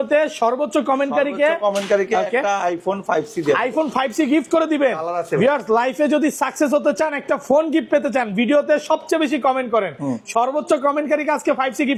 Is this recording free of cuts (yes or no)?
yes